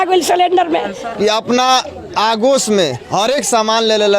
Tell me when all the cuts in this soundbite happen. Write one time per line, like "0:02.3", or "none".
0:01.0